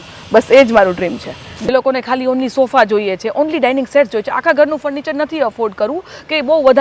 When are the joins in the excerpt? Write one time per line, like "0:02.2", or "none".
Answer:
0:01.7